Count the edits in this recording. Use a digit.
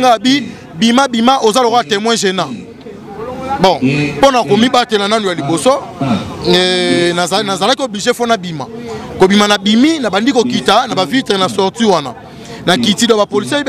0